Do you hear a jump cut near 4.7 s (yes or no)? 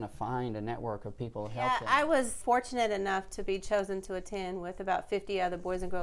no